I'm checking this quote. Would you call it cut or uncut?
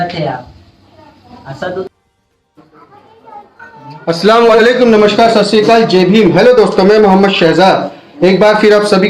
cut